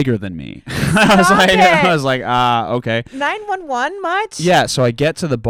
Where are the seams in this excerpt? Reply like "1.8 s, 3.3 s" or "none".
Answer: none